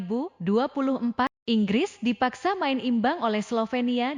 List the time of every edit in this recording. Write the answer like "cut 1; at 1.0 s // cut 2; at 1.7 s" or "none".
cut 1; at 1.4 s